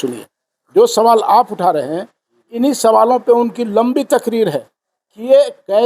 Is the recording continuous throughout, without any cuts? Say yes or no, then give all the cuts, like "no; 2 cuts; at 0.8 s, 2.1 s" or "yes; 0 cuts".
yes; 0 cuts